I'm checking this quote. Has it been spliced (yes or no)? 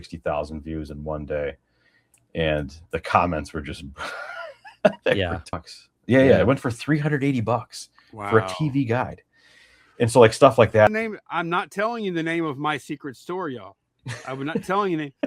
yes